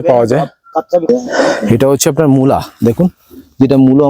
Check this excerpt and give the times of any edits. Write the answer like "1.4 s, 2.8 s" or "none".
1.1 s